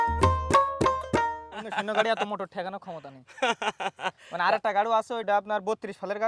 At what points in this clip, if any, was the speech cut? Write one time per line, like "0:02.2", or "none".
0:01.7
0:05.2